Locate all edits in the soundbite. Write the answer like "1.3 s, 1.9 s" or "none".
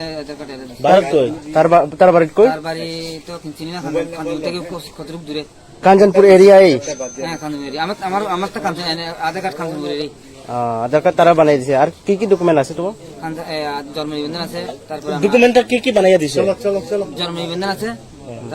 none